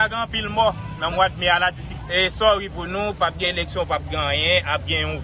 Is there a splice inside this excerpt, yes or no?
yes